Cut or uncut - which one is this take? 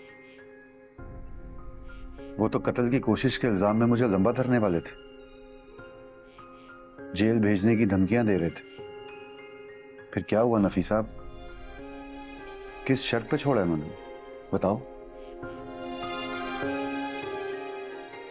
uncut